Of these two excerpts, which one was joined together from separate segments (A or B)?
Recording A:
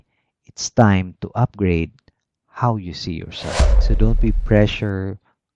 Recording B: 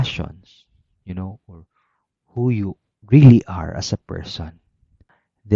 A